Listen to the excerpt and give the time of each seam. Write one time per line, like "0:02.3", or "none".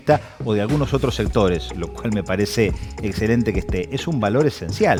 none